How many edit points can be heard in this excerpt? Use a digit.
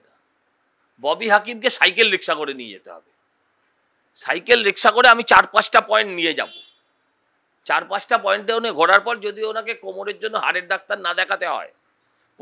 0